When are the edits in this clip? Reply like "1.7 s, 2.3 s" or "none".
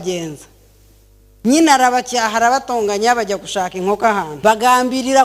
4.3 s